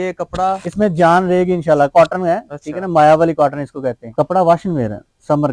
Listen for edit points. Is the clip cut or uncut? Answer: cut